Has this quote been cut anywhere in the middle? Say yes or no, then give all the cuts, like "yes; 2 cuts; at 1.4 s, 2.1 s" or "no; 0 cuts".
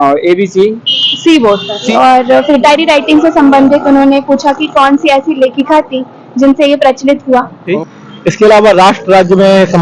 yes; 3 cuts; at 1.9 s, 7.7 s, 8.9 s